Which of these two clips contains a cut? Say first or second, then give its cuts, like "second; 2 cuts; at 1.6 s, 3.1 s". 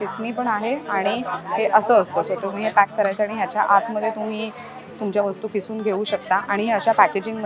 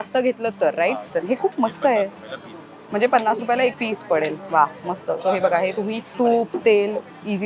second; 2 cuts; at 1.1 s, 6.1 s